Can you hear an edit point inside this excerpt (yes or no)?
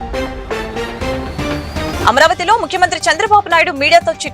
yes